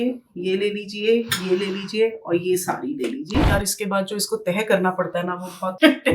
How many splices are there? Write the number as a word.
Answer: one